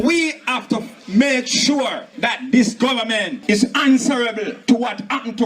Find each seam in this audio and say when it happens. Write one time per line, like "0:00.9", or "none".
0:00.9
0:02.1
0:03.3
0:04.5